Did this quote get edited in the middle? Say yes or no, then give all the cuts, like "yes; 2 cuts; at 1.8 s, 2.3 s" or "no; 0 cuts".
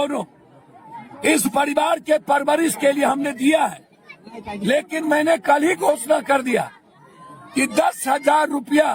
no; 0 cuts